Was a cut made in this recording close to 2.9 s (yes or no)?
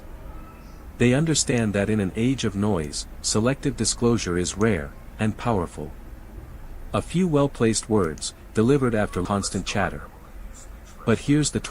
no